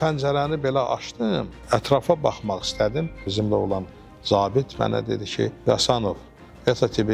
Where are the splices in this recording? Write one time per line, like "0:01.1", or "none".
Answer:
0:01.5
0:03.3
0:05.6